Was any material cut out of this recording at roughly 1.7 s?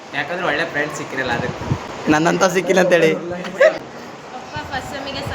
yes; 2 cuts; at 1.7 s, 3.8 s

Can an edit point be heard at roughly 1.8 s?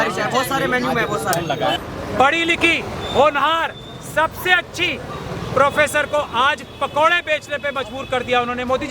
yes; 1 cut; at 1.8 s

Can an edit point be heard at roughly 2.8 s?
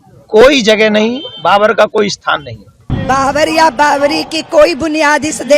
yes; 1 cut; at 2.8 s

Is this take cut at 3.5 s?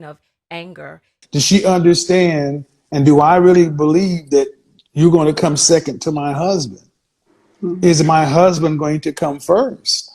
yes; 1 cut; at 3.5 s

